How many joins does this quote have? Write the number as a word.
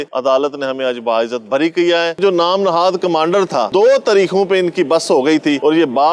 two